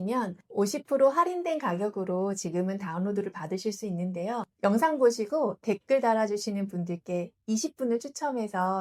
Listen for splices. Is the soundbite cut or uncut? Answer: uncut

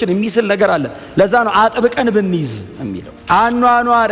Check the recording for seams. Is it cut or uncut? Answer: cut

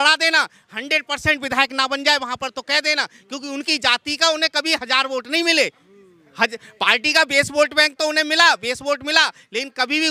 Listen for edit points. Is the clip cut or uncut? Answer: uncut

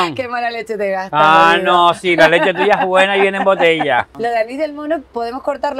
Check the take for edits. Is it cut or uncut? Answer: cut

